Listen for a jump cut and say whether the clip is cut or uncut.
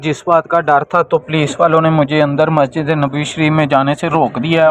uncut